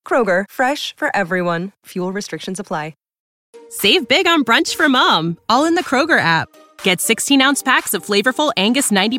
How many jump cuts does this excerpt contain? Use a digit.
1